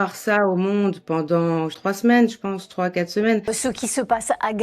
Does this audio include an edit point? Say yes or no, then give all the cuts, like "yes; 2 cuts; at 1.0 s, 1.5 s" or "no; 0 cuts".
yes; 2 cuts; at 1.8 s, 3.5 s